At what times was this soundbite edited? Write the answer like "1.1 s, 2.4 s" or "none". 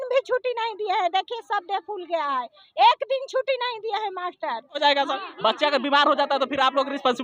4.8 s